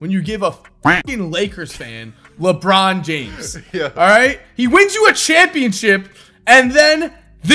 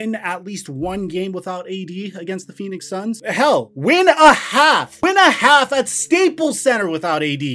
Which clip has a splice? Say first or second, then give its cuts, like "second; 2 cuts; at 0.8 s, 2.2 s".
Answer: second; 2 cuts; at 3.2 s, 4.9 s